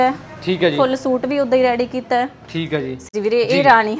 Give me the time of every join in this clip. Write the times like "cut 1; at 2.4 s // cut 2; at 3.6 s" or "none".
cut 1; at 3.1 s